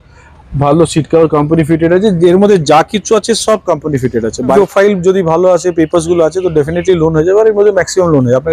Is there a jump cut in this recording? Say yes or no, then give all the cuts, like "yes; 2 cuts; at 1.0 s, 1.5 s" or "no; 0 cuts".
yes; 1 cut; at 4.5 s